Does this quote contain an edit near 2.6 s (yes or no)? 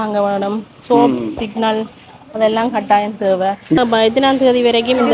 no